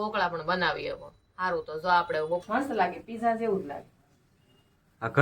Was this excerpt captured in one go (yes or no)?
no